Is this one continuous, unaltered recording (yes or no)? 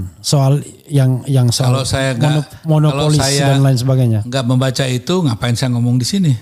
yes